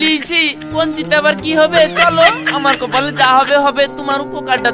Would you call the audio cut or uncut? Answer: uncut